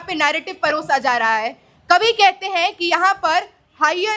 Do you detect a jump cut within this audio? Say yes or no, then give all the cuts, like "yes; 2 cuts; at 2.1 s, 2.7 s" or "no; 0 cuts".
no; 0 cuts